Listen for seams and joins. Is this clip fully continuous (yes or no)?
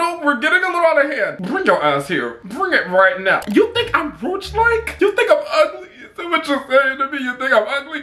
yes